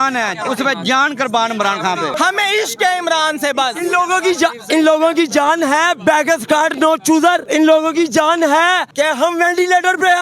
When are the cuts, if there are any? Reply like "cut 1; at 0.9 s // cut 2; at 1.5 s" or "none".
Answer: cut 1; at 2.2 s // cut 2; at 7.4 s // cut 3; at 8.9 s